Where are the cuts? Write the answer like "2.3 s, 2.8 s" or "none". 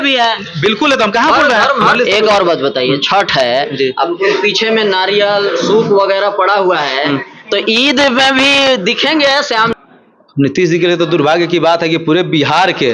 1.9 s, 9.7 s